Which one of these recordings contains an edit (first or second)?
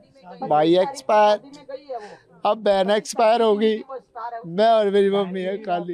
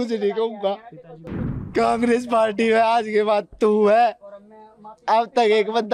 second